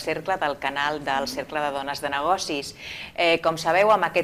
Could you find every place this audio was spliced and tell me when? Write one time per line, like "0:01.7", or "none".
none